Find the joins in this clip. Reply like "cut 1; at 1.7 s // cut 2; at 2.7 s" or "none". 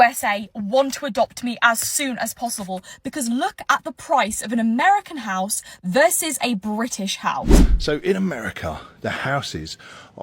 cut 1; at 7.6 s

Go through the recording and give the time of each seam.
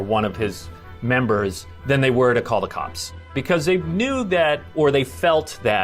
cut 1; at 3.4 s

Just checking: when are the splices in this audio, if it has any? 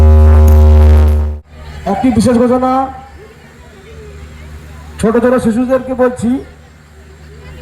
cut 1; at 1.3 s

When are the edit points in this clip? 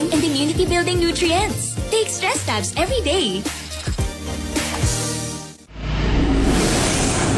cut 1; at 5.5 s

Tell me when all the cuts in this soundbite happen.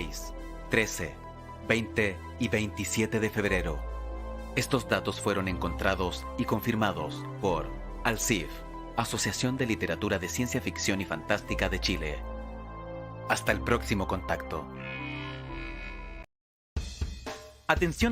cut 1; at 16.3 s

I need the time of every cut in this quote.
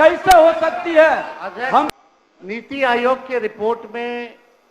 cut 1; at 1.9 s

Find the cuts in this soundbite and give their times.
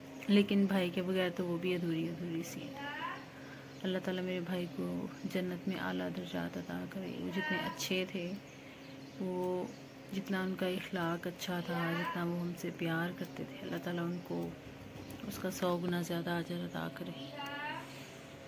none

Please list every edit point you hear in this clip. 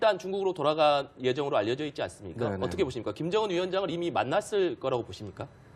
cut 1; at 2.5 s

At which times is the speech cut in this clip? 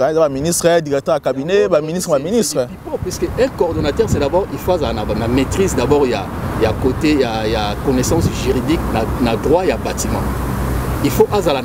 none

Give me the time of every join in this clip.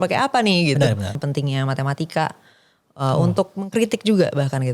cut 1; at 1.2 s

